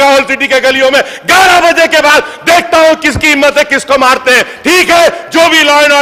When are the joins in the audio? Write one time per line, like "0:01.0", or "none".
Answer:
none